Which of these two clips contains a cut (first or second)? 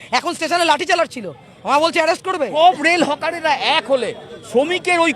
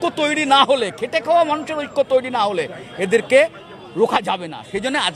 first